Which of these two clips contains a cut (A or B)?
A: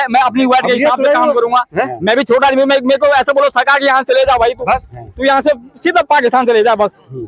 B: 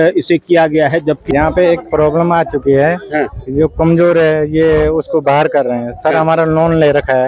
B